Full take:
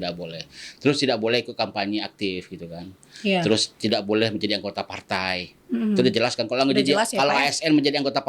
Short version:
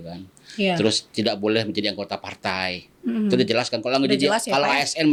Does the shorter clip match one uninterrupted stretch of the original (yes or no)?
yes